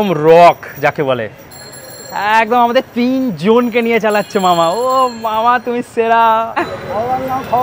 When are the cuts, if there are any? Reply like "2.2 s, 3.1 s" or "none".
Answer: 6.6 s